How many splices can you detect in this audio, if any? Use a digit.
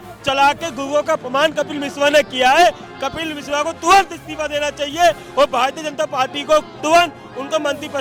0